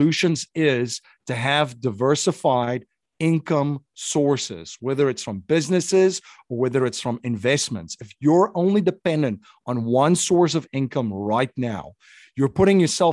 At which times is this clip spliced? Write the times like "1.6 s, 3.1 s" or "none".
none